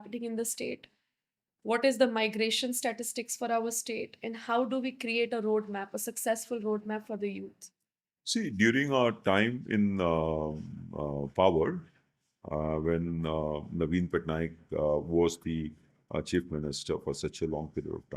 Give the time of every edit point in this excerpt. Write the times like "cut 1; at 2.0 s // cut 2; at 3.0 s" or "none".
none